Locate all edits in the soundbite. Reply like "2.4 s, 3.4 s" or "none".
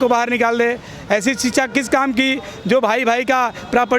none